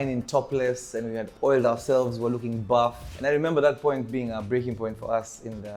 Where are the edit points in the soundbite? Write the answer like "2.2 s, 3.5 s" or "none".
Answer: none